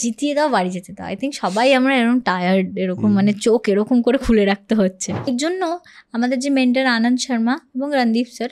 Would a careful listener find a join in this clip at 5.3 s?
yes; 1 cut; at 5.3 s

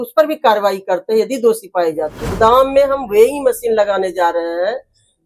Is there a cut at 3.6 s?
no; 1 cut; at 2.2 s

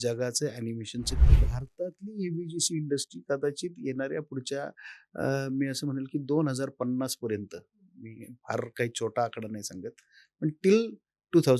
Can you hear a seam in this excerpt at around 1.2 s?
yes; 1 cut; at 1.2 s

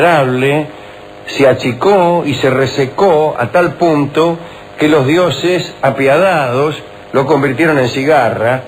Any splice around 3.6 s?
no; 0 cuts

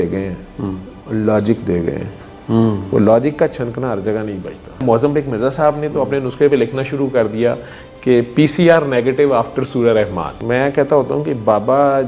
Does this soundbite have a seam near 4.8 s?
yes; 2 cuts; at 4.8 s, 10.3 s

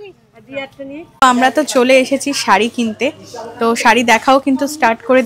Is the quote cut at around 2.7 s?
no; 1 cut; at 1.1 s

